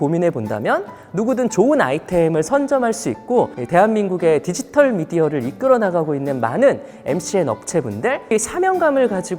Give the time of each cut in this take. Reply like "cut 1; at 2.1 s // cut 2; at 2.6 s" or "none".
cut 1; at 3.6 s // cut 2; at 8.3 s